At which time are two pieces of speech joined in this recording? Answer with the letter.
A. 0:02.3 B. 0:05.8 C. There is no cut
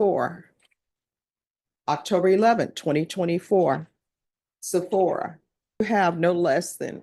B